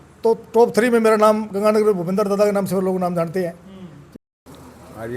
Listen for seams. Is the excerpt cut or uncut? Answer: cut